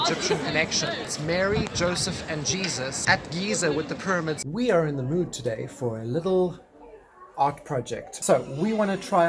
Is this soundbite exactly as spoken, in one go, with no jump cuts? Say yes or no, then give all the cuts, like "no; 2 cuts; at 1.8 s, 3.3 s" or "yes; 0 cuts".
no; 4 cuts; at 1.1 s, 3.0 s, 4.4 s, 8.1 s